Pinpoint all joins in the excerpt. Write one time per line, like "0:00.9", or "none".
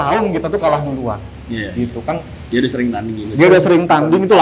none